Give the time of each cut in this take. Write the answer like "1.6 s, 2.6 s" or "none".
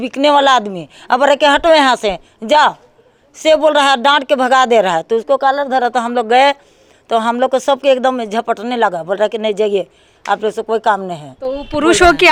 none